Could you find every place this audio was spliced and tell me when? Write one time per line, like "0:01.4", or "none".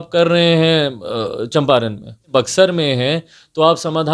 0:02.2